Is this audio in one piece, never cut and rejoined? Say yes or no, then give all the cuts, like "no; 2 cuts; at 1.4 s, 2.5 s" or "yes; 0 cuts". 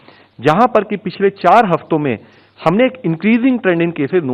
yes; 0 cuts